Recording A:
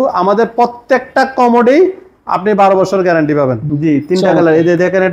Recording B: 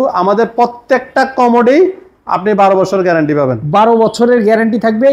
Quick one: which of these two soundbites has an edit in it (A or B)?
A